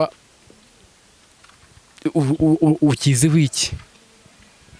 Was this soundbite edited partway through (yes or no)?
no